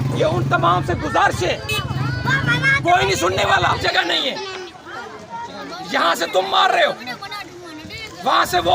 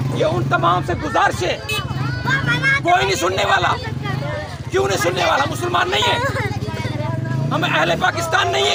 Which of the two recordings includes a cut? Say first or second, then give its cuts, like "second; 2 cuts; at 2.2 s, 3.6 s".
first; 1 cut; at 3.8 s